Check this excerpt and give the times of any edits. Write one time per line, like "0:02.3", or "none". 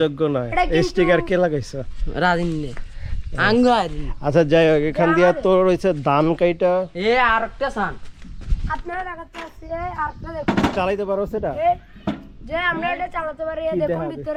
none